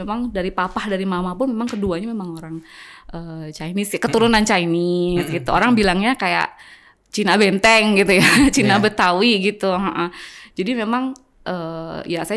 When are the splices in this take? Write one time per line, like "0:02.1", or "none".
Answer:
none